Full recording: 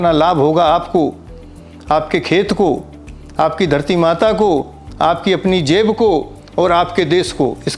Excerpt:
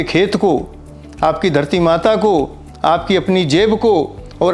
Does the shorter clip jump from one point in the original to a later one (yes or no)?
no